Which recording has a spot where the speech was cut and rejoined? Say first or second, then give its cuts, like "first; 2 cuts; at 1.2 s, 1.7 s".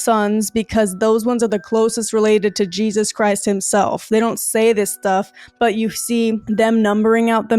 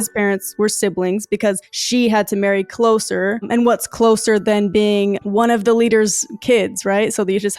first; 1 cut; at 6.4 s